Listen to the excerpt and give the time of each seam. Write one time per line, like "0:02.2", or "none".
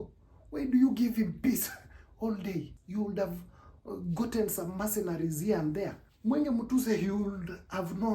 0:02.8
0:06.1